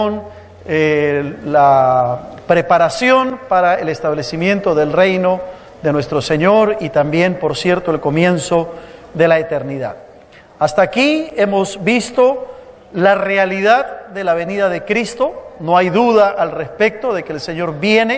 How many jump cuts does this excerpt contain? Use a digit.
1